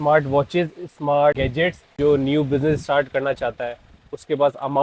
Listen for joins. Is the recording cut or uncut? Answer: cut